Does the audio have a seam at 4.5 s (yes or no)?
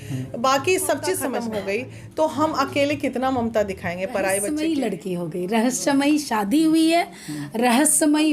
yes